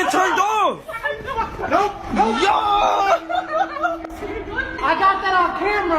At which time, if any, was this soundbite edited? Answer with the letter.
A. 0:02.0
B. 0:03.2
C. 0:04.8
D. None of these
C